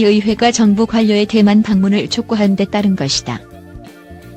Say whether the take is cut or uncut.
uncut